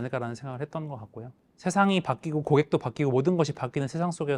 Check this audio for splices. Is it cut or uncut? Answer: cut